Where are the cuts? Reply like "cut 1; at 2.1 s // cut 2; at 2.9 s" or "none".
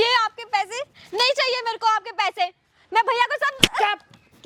none